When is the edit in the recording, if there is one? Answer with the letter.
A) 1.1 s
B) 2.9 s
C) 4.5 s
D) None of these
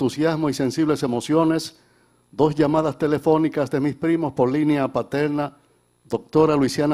C